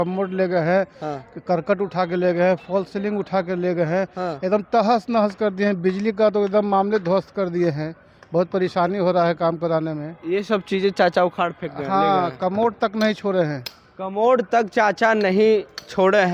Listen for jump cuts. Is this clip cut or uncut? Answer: uncut